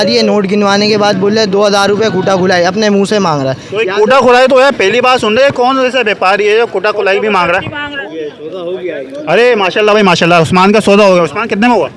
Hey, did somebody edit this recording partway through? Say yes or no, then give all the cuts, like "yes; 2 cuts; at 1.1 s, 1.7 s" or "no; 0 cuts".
yes; 1 cut; at 7.8 s